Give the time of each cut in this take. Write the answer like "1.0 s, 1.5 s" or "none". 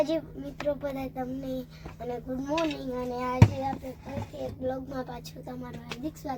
none